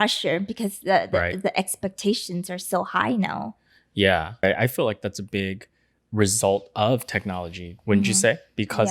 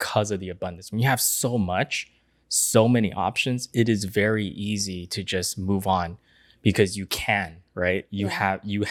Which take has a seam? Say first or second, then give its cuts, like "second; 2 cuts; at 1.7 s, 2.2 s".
first; 1 cut; at 4.4 s